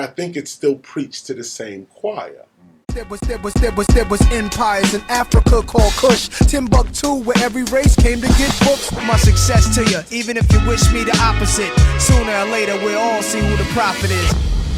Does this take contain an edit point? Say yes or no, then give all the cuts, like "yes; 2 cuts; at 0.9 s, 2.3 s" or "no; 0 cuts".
yes; 1 cut; at 2.8 s